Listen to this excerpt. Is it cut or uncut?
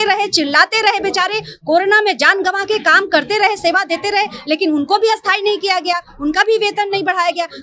uncut